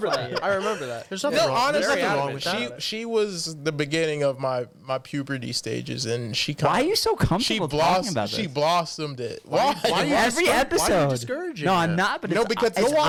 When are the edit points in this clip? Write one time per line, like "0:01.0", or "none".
none